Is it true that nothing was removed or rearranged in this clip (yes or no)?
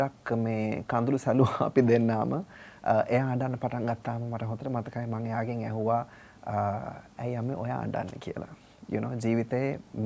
yes